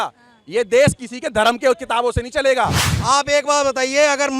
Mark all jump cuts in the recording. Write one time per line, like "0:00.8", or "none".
0:02.8